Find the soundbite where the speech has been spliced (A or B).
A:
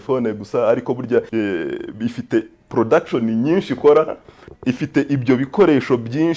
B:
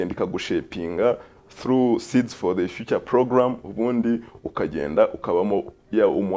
A